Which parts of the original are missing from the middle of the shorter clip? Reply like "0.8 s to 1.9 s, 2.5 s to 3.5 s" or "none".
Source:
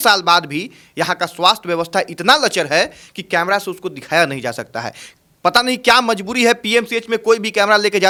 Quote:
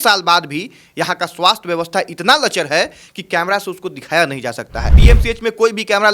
5.0 s to 6.6 s